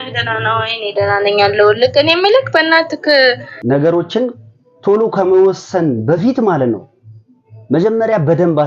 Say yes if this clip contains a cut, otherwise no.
yes